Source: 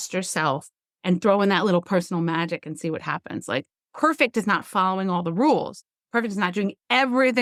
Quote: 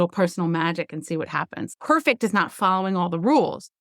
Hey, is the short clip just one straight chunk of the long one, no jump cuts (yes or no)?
no